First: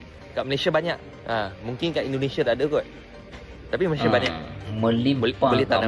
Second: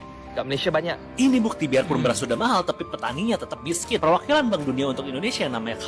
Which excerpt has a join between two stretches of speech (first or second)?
second